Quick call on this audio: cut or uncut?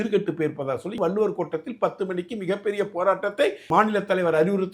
cut